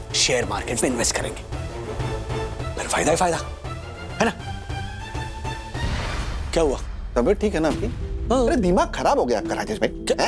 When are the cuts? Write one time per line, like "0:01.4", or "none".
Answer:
none